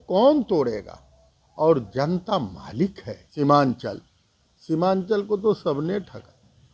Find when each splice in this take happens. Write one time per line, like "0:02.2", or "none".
0:03.2